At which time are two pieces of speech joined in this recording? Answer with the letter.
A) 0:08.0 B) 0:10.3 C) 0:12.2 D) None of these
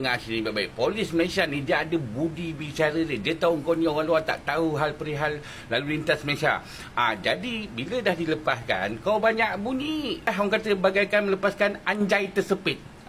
B